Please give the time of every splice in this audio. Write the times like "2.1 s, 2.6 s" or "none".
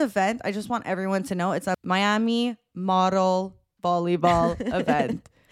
1.8 s